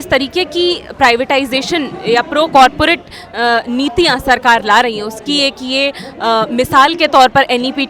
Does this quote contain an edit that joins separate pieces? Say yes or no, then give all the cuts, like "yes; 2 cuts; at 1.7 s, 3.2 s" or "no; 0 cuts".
no; 0 cuts